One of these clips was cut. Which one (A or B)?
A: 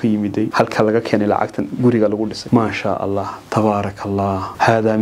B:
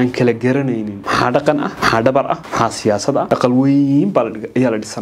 B